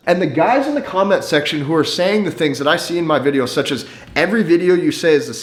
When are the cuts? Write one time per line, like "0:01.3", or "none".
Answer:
none